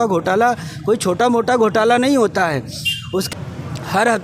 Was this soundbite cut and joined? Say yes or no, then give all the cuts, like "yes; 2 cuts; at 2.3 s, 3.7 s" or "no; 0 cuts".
yes; 1 cut; at 3.3 s